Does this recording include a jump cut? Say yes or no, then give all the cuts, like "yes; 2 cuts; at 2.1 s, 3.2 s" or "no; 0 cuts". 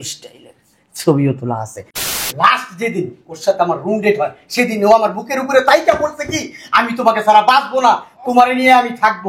yes; 1 cut; at 2.0 s